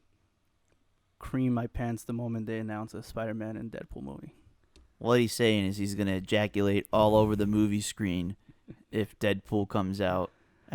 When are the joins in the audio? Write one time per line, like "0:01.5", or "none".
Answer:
none